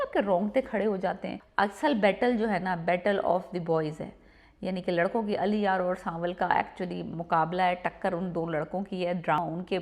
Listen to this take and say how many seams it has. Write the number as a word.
one